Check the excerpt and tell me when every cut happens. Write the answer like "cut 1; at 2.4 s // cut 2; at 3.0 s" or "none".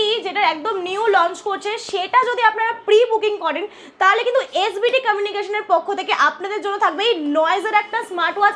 none